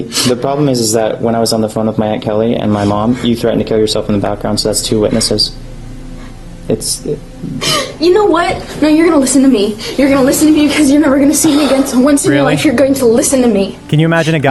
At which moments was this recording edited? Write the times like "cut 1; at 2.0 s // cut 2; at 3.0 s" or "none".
none